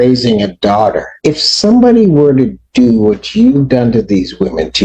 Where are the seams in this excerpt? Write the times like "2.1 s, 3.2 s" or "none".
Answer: 1.1 s